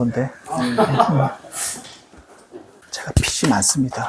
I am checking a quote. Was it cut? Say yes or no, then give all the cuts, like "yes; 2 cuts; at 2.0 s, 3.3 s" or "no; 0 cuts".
yes; 1 cut; at 2.9 s